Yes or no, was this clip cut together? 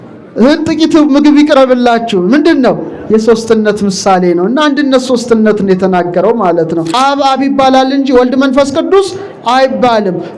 yes